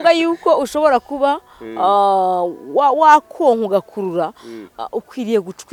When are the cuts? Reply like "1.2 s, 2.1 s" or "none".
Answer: none